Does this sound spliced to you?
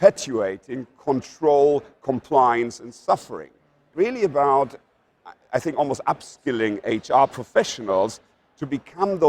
yes; 1 cut; at 3.9 s

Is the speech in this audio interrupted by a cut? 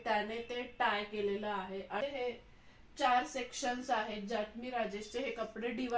yes; 1 cut; at 2.0 s

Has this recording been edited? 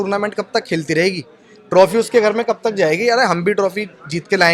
no; 0 cuts

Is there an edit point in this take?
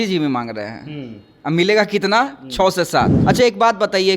yes; 1 cut; at 3.1 s

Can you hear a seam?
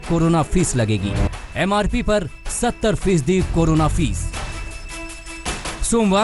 yes; 1 cut; at 1.3 s

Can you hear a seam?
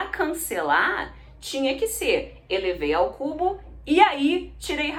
no; 0 cuts

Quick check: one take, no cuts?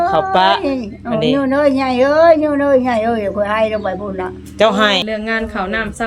no; 1 cut; at 5.0 s

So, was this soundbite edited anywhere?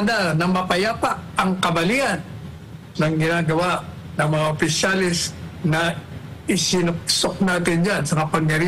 no; 0 cuts

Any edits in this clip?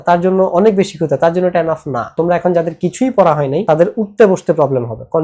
yes; 2 cuts; at 2.1 s, 3.6 s

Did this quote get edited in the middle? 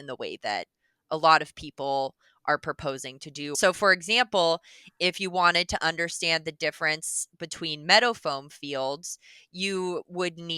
yes; 1 cut; at 3.6 s

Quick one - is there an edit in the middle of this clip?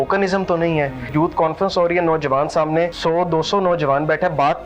yes; 2 cuts; at 1.1 s, 3.0 s

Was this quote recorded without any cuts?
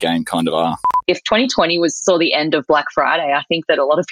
no; 1 cut; at 0.9 s

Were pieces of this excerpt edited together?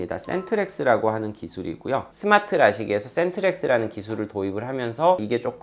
yes; 1 cut; at 2.1 s

